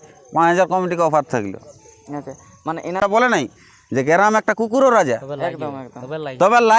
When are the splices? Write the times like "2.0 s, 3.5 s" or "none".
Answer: 3.0 s